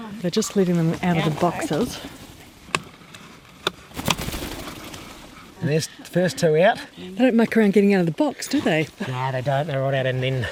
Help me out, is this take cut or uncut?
uncut